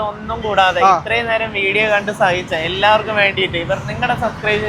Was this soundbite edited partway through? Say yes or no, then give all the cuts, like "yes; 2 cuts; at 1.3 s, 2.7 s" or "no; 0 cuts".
no; 0 cuts